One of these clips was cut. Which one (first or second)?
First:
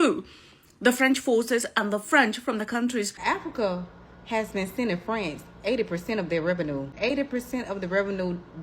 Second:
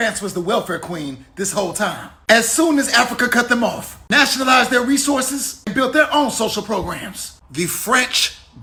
first